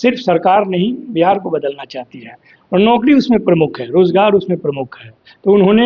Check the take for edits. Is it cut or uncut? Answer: uncut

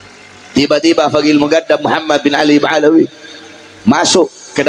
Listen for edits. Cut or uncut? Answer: uncut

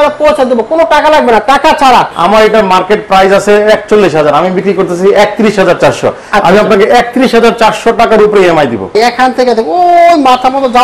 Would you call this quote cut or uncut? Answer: cut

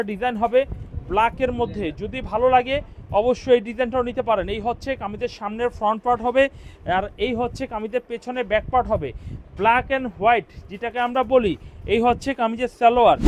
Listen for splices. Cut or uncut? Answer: uncut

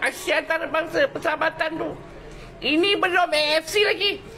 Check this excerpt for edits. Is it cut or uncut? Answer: uncut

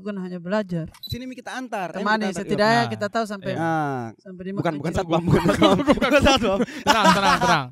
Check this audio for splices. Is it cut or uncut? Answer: cut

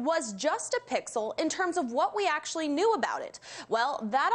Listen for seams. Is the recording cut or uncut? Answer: uncut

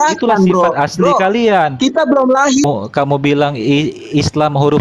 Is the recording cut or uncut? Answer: cut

